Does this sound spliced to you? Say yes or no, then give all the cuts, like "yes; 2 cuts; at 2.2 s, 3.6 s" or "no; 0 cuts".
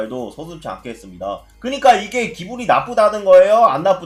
no; 0 cuts